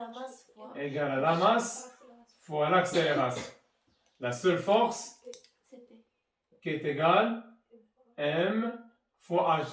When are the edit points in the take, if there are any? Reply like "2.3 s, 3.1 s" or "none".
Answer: none